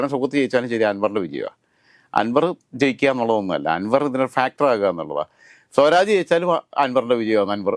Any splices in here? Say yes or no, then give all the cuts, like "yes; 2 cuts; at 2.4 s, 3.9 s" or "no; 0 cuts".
no; 0 cuts